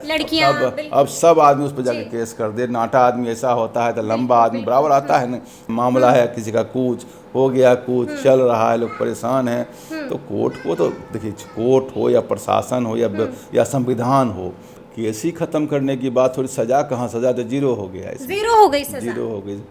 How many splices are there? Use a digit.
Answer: 2